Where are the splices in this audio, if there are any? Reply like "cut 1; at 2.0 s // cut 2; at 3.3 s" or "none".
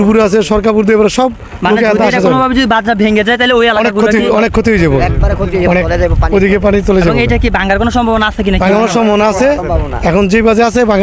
none

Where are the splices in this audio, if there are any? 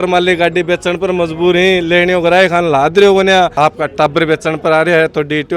cut 1; at 3.5 s

